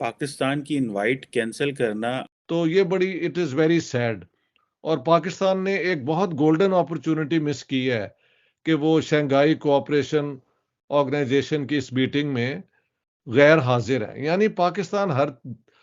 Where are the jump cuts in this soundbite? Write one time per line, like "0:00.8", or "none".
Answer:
0:02.2

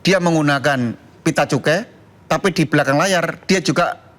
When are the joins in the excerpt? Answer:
none

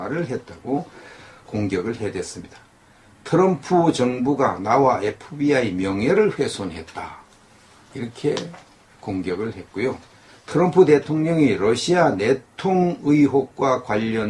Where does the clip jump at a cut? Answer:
0:08.1

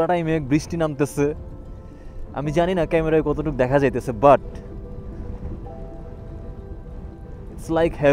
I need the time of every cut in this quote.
none

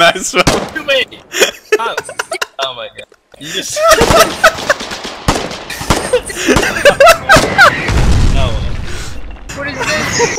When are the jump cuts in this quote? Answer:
0:09.4

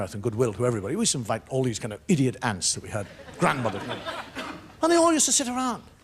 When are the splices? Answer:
0:03.6

